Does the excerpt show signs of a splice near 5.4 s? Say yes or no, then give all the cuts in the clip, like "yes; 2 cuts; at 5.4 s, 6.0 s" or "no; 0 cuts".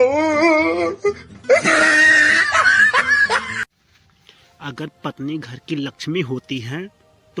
no; 2 cuts; at 1.6 s, 3.8 s